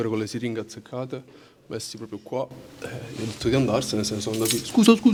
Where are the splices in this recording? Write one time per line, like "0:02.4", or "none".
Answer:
none

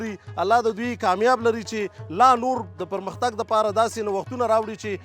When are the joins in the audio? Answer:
0:02.7

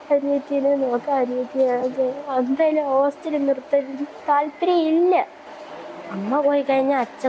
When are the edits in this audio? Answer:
0:05.5

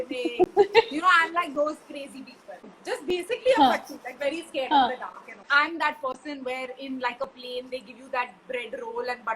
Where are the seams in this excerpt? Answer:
0:02.7
0:05.5

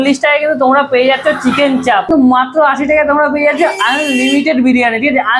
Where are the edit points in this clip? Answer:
0:02.1

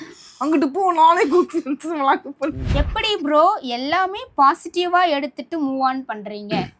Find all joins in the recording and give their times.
0:02.6

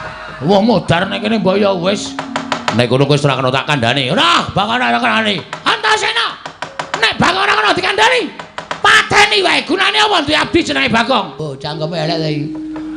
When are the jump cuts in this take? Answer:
0:11.4

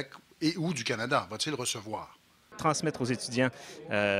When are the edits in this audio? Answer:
0:02.6

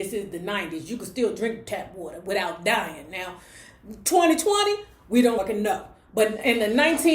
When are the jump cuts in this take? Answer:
0:05.4

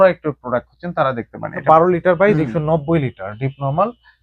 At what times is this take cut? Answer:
0:01.5

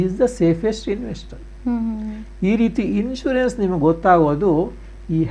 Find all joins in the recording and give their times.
none

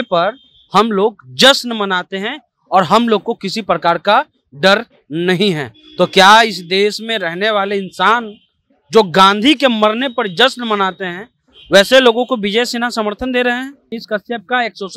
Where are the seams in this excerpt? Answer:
0:14.0

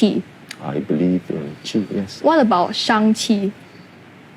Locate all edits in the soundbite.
0:02.1

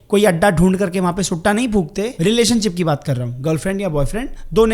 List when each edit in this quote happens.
0:02.1

